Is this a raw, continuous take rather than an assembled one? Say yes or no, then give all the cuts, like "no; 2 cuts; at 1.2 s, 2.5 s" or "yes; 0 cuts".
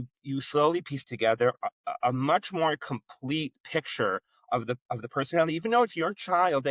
yes; 0 cuts